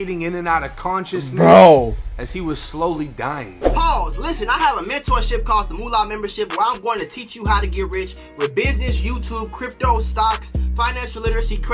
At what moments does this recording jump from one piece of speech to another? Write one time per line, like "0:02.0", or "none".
none